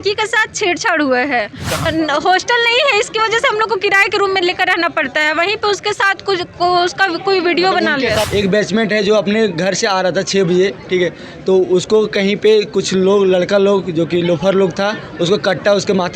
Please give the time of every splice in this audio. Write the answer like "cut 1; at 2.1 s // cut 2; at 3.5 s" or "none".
cut 1; at 1.9 s // cut 2; at 8.3 s